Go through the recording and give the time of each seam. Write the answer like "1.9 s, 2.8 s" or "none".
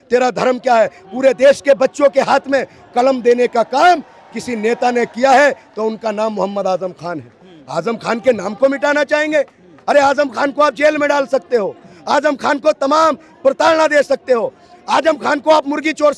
none